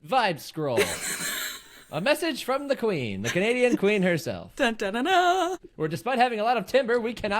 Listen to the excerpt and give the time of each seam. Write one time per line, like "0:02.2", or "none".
0:05.8